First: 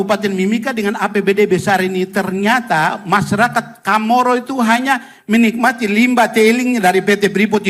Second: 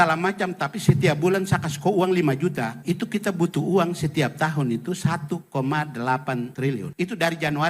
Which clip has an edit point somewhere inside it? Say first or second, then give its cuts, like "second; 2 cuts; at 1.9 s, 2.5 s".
second; 2 cuts; at 2.8 s, 6.7 s